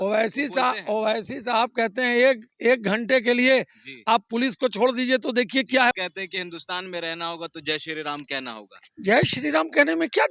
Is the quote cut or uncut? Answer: cut